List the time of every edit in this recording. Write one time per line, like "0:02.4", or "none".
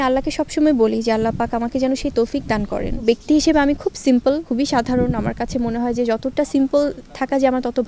0:03.0
0:04.4

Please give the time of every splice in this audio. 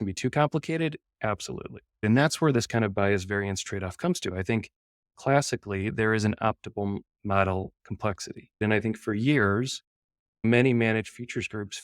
0:02.0
0:08.6

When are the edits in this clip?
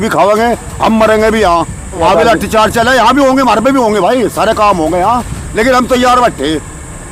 0:02.0

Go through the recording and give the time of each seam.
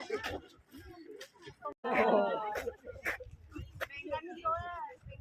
none

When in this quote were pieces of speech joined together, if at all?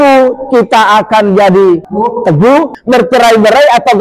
0:01.9
0:02.8

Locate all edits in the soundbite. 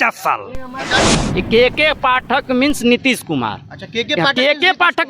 0:00.9

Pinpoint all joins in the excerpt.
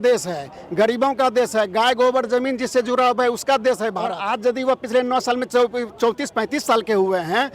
0:04.2

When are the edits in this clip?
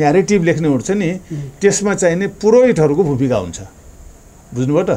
none

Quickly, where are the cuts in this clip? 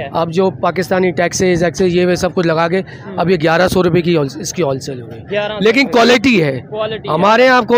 none

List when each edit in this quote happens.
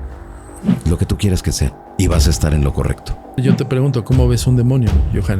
0:01.8
0:03.4

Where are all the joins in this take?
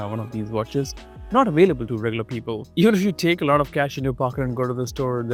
none

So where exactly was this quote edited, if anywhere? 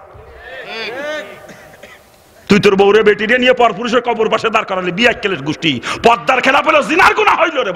none

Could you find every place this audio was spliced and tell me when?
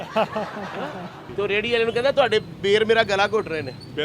0:01.2

